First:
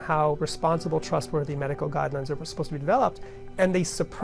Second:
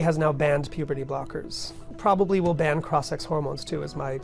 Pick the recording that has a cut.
second; 1 cut; at 1.8 s

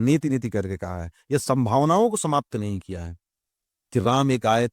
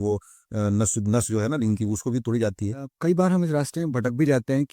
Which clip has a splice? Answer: second; 1 cut; at 2.9 s

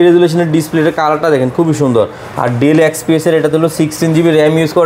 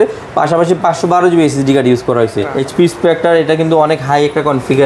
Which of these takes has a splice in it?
second; 1 cut; at 2.5 s

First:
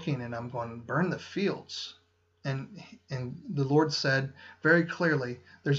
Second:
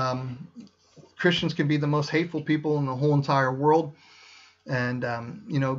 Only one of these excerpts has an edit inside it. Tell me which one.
first; 1 cut; at 4.8 s

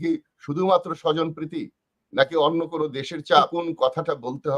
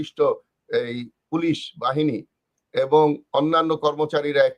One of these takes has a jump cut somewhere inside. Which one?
first; 1 cut; at 3.5 s

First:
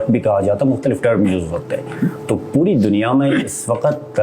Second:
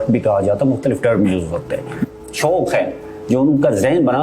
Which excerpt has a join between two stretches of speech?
second; 1 cut; at 2.2 s

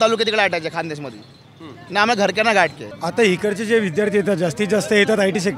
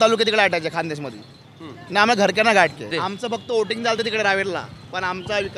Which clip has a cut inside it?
first; 1 cut; at 2.8 s

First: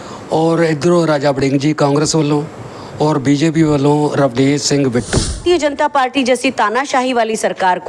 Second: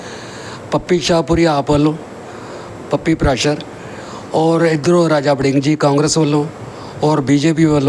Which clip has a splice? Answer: first; 1 cut; at 5.4 s

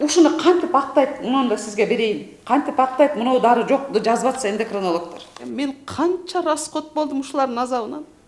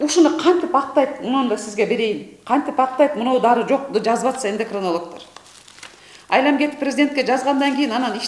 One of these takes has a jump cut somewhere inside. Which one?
first; 1 cut; at 5.4 s

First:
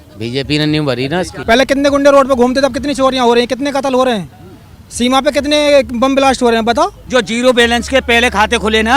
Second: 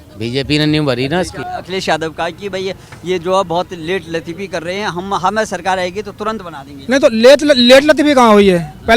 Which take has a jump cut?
first; 2 cuts; at 1.3 s, 7.0 s

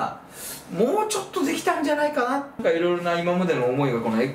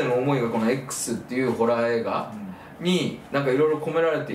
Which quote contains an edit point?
first; 1 cut; at 2.6 s

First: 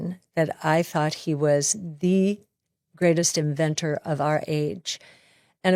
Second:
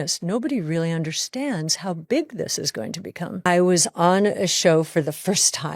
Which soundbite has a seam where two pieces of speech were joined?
second; 1 cut; at 3.4 s

